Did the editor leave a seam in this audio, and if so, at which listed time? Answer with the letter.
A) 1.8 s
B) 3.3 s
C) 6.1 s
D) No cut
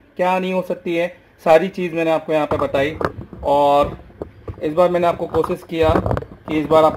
D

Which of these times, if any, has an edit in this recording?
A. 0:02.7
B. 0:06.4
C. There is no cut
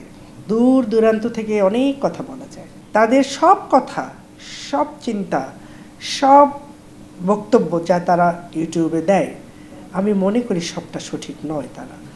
A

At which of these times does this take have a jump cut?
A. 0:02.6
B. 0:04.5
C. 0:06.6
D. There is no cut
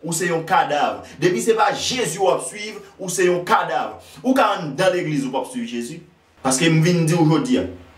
C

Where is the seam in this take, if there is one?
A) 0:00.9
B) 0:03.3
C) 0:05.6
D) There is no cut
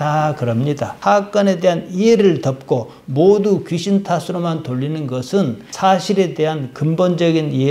A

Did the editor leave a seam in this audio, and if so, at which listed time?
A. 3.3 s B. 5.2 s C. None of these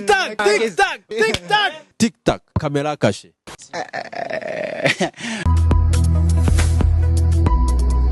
C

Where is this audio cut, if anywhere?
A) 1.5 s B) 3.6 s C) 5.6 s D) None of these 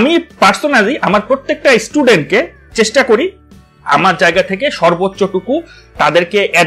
D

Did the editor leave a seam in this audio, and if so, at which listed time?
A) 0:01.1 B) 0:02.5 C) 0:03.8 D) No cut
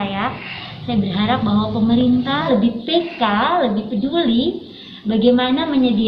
B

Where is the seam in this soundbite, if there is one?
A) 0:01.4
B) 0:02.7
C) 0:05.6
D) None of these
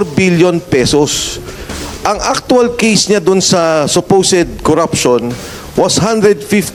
D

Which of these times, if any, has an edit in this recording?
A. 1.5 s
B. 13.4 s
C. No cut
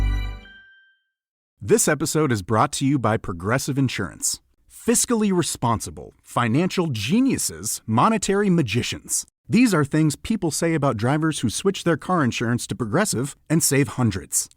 A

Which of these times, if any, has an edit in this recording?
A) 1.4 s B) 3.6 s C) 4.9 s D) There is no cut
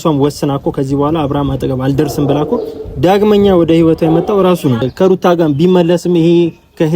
C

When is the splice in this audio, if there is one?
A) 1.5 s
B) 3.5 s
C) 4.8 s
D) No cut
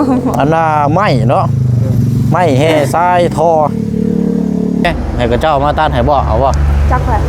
C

